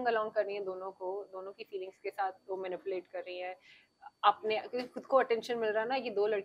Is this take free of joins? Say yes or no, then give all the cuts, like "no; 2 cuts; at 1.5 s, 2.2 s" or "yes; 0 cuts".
yes; 0 cuts